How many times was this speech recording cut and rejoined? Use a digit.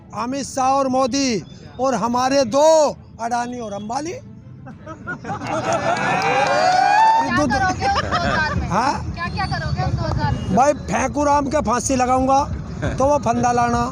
1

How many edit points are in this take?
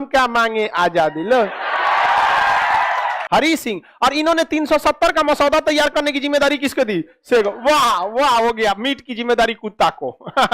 1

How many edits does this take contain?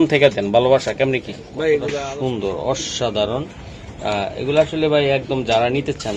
1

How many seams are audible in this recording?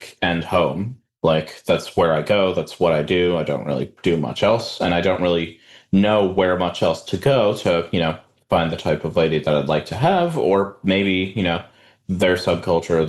1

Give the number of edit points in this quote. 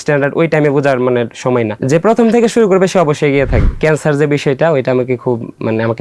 2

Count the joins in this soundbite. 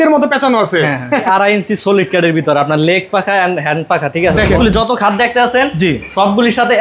2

